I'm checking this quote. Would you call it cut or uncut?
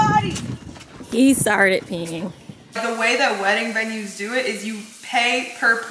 cut